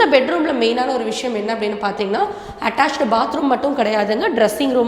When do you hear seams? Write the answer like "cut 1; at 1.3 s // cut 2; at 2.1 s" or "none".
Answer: none